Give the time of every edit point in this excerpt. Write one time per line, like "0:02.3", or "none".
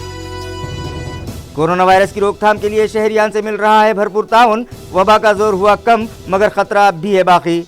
0:01.1